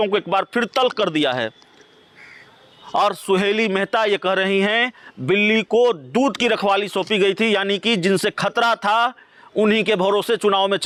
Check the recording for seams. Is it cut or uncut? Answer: uncut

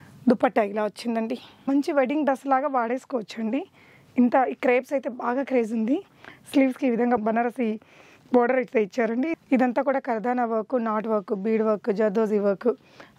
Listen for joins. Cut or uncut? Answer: cut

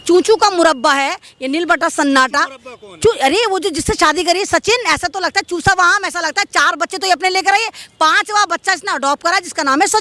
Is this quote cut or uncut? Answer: uncut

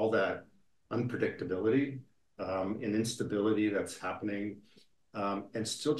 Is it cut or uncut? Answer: uncut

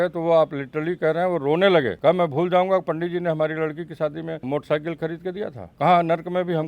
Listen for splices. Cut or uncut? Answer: cut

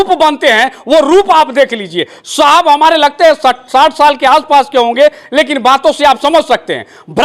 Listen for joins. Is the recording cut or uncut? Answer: uncut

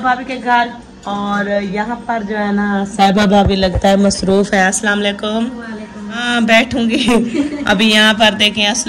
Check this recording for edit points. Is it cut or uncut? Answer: cut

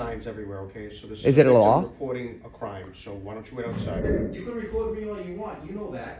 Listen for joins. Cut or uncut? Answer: cut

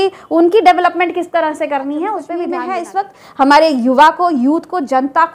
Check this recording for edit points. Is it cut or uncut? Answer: cut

